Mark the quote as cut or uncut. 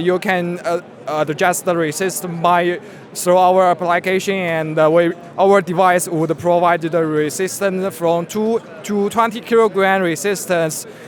uncut